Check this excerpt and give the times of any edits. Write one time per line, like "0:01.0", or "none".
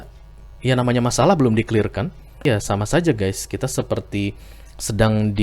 0:02.4